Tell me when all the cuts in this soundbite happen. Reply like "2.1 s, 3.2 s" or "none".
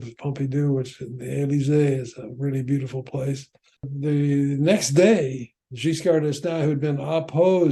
3.9 s